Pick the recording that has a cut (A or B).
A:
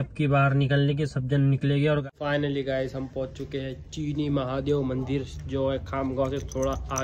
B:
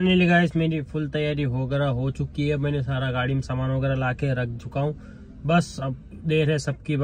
A